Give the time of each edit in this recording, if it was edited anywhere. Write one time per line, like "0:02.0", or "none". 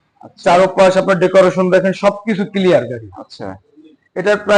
none